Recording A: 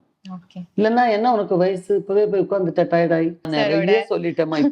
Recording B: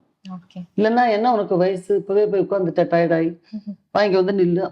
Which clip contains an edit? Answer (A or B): A